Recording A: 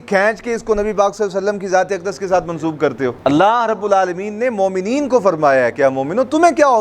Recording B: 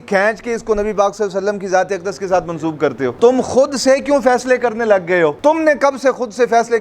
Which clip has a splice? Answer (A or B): B